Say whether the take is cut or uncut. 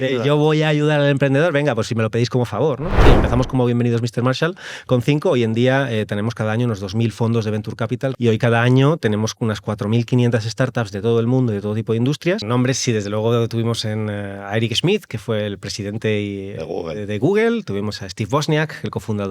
cut